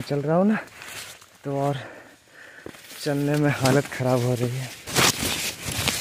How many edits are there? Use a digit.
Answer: 1